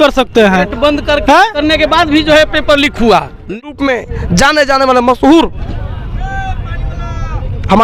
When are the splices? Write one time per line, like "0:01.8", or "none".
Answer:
0:03.4